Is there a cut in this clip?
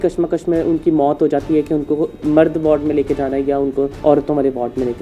yes; 2 cuts; at 2.1 s, 3.9 s

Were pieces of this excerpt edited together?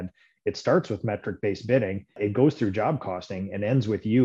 yes; 1 cut; at 2.2 s

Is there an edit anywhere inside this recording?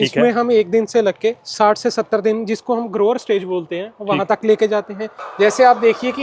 yes; 1 cut; at 5.2 s

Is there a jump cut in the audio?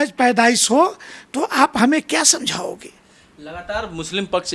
no; 0 cuts

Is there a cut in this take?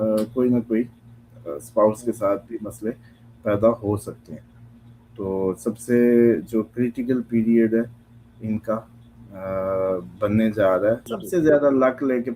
yes; 1 cut; at 11.1 s

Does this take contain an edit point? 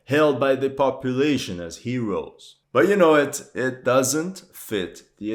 no; 0 cuts

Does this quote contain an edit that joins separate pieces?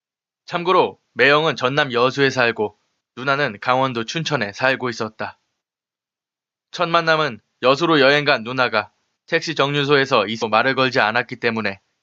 no; 0 cuts

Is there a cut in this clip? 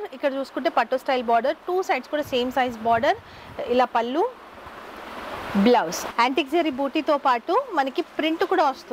yes; 1 cut; at 6.1 s

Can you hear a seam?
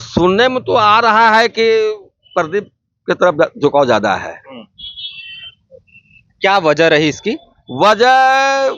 no; 0 cuts

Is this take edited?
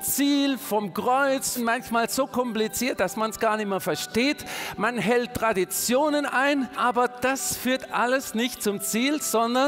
yes; 2 cuts; at 1.6 s, 6.7 s

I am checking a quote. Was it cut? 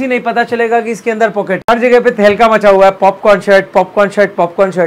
yes; 1 cut; at 1.6 s

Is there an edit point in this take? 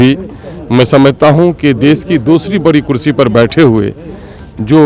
no; 0 cuts

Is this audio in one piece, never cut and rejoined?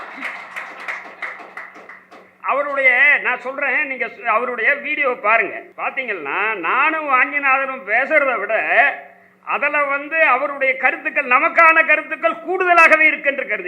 no; 1 cut; at 5.7 s

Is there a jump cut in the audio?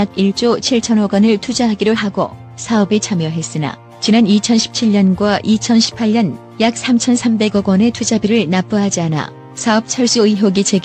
no; 0 cuts

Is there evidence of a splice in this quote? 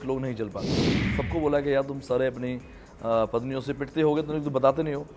yes; 1 cut; at 1.0 s

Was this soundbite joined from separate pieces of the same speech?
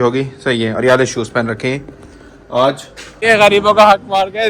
yes; 1 cut; at 3.2 s

